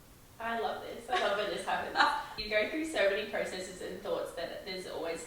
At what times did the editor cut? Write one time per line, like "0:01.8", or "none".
none

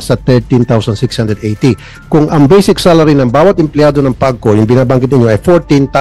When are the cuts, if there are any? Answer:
none

